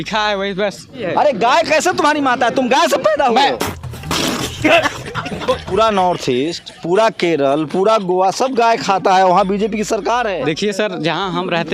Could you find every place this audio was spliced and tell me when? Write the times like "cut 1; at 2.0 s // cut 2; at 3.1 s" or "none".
cut 1; at 1.0 s // cut 2; at 3.6 s // cut 3; at 5.6 s // cut 4; at 10.4 s